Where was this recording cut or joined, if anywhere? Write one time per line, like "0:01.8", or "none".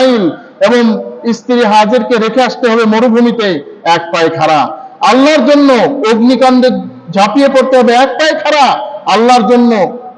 none

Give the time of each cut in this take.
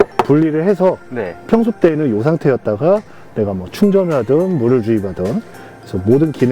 none

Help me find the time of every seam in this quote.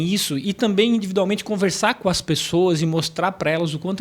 none

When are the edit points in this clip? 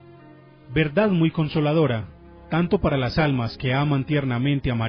none

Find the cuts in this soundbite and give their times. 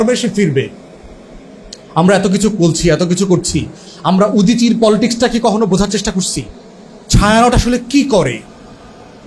none

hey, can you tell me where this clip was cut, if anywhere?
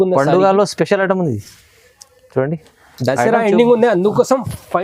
none

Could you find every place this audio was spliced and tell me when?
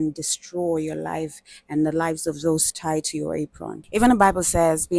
0:03.8

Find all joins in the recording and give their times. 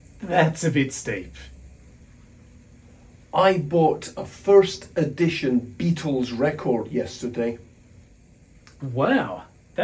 0:01.9

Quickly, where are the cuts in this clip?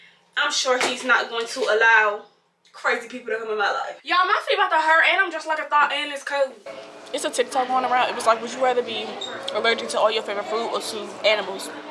0:04.0
0:06.7

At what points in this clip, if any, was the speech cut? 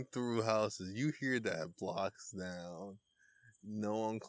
none

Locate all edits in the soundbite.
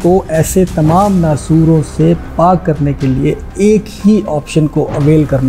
none

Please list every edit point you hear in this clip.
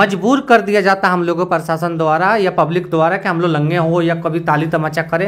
none

